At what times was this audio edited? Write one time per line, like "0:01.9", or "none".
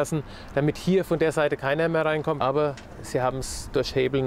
0:02.4